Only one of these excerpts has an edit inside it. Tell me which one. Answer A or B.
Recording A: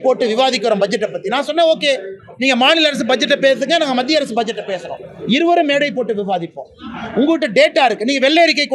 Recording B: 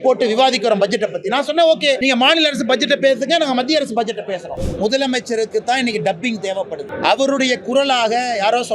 B